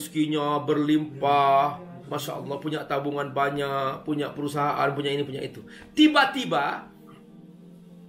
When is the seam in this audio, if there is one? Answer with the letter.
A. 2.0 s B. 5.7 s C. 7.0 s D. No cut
C